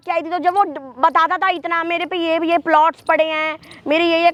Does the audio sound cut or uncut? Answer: uncut